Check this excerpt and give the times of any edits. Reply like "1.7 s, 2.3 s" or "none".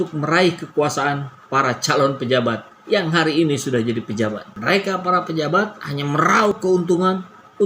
4.4 s